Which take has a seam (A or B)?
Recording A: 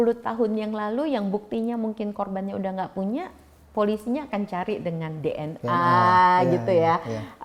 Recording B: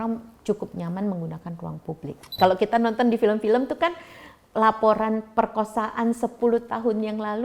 B